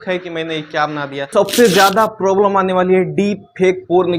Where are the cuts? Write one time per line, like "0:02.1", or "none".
0:01.3